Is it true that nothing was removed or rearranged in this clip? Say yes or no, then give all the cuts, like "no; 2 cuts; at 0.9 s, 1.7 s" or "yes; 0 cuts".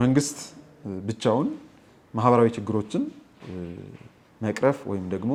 yes; 0 cuts